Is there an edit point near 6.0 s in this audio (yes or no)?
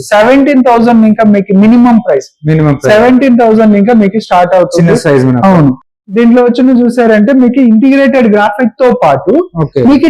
yes